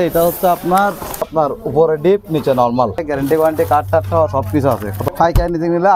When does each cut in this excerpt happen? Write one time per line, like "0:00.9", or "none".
0:01.3
0:03.1
0:05.0